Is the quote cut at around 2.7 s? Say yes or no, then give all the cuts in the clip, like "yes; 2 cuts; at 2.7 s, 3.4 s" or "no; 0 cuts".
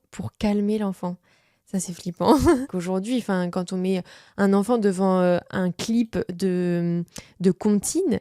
yes; 1 cut; at 2.7 s